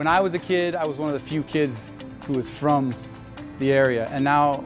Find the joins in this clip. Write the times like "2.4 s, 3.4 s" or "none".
none